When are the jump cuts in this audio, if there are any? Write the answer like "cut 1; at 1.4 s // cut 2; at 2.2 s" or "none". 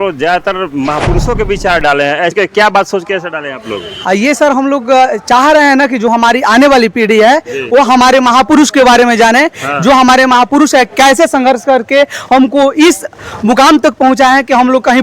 cut 1; at 2.3 s